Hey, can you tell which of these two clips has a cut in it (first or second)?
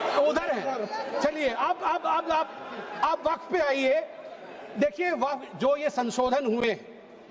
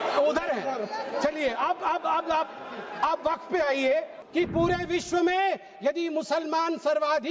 second